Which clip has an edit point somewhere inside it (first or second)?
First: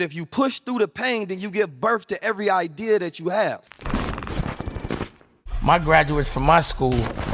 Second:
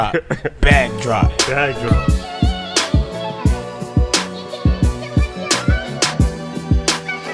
first